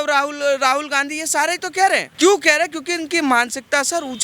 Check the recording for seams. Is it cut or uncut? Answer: cut